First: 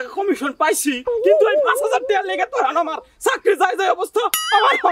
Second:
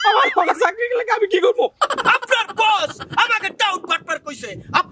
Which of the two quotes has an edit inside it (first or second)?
second